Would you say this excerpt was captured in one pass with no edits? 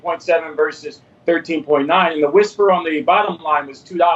no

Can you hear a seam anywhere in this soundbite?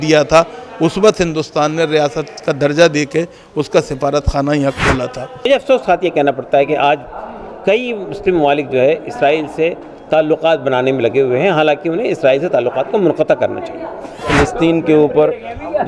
yes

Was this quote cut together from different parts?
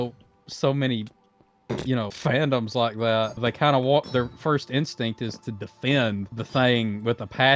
yes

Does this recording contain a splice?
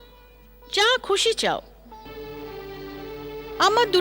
yes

